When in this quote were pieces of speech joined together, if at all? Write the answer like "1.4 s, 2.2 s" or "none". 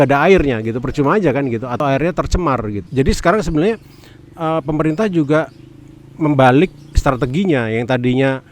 1.7 s, 2.8 s